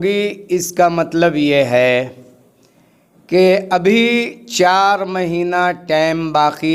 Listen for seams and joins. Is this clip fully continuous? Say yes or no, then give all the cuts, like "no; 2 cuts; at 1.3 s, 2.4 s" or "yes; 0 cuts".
yes; 0 cuts